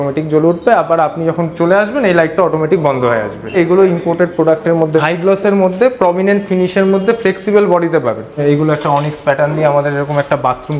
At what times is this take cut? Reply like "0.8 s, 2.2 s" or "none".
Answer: 3.5 s, 5.0 s, 8.3 s